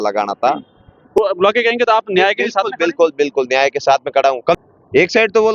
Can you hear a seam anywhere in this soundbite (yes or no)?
yes